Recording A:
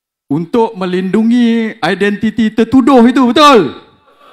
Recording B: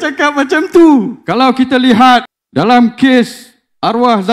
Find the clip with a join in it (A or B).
B